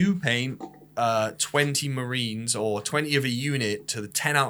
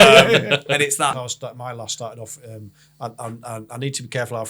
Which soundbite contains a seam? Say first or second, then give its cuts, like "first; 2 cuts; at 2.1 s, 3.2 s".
second; 1 cut; at 1.2 s